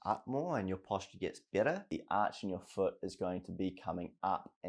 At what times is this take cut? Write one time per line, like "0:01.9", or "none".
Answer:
0:01.9